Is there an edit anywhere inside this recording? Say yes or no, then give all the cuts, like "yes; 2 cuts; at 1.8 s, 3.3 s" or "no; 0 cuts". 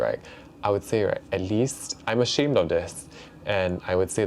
no; 0 cuts